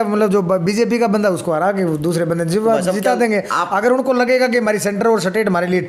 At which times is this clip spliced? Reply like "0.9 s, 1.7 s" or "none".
none